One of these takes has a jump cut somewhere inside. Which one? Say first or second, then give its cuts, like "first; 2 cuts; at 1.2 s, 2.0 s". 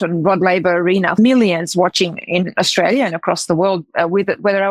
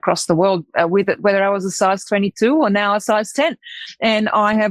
first; 1 cut; at 1.2 s